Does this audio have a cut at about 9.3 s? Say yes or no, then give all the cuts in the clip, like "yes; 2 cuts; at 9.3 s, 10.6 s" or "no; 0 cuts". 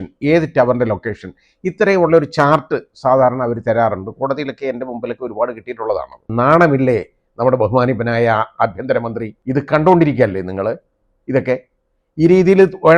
yes; 2 cuts; at 6.3 s, 9.3 s